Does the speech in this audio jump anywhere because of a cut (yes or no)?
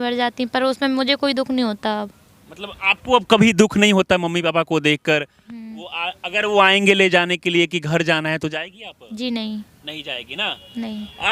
no